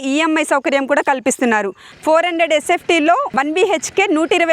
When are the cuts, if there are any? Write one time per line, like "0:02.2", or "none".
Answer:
0:01.9
0:03.3

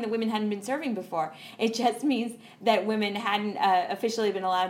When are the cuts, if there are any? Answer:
none

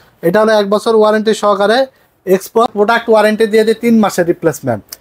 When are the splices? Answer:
0:02.7

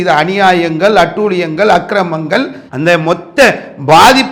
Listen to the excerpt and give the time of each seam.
none

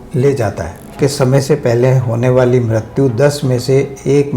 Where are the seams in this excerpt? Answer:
0:01.0

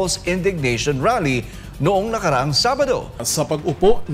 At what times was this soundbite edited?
0:03.2

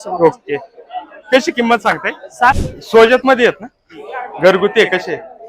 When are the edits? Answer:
0:02.5

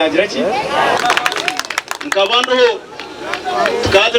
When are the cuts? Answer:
0:01.0

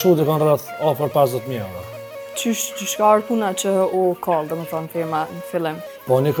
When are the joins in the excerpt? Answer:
none

